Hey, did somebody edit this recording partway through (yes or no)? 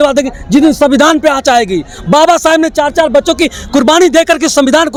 no